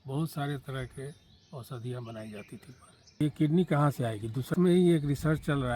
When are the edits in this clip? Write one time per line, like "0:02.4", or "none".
0:03.2
0:04.5

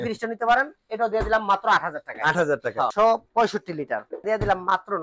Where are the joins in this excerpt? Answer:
0:02.9
0:04.2

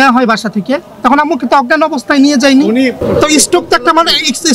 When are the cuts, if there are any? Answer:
0:03.0

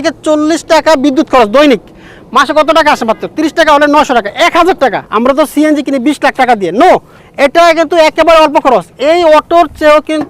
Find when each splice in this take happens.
0:05.0

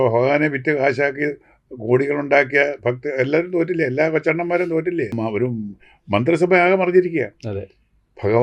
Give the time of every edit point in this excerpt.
0:05.1

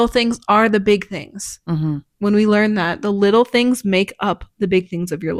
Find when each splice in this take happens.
none

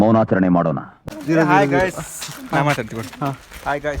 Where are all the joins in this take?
0:00.9

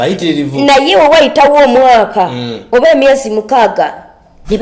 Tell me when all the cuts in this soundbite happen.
none

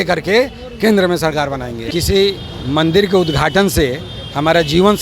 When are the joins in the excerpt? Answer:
0:01.8

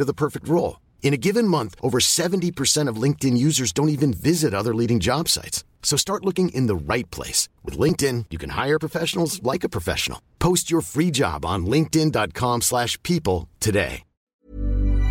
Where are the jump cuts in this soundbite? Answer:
0:14.2

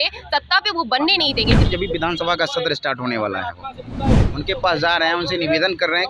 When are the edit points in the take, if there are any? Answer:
0:01.6
0:04.3

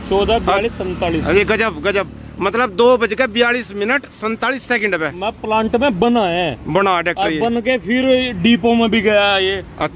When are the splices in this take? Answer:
none

